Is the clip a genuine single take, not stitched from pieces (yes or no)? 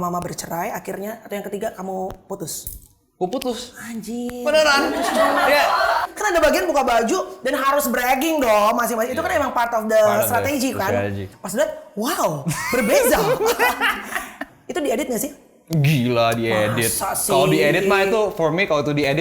no